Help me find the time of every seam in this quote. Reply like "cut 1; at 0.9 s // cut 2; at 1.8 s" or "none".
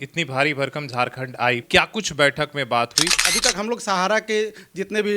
cut 1; at 1.6 s // cut 2; at 3.2 s